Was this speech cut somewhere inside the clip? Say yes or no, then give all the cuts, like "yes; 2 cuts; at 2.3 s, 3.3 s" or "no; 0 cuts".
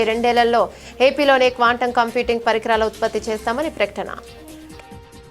yes; 1 cut; at 4.2 s